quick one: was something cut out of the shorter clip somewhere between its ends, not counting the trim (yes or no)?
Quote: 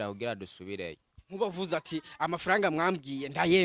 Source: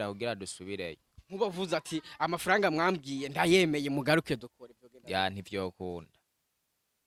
no